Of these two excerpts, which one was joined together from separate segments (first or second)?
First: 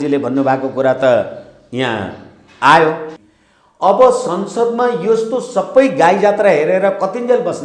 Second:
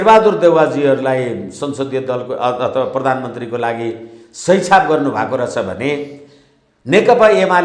first